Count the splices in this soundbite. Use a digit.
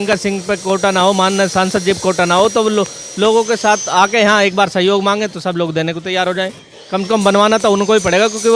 0